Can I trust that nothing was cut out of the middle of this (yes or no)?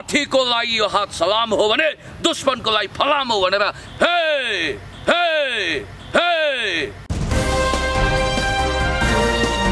yes